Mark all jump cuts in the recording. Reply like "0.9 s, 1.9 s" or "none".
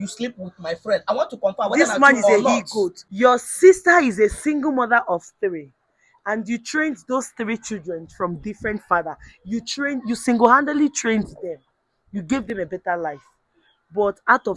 3.0 s